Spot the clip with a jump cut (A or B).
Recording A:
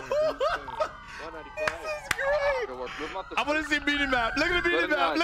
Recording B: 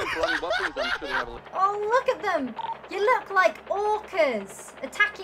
B